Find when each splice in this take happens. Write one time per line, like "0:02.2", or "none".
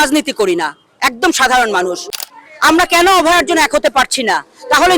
0:02.1